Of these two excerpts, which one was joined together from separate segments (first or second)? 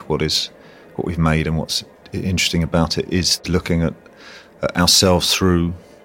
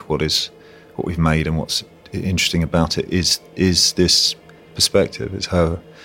first